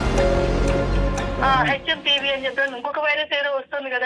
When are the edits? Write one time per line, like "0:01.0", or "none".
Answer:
0:01.4